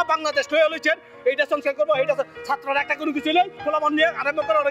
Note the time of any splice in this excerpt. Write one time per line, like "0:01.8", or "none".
0:03.6